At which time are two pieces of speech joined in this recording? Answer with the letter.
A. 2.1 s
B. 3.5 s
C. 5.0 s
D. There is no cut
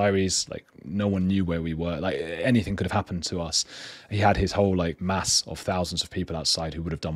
C